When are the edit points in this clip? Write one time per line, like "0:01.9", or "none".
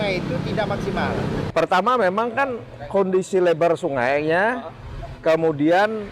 0:01.4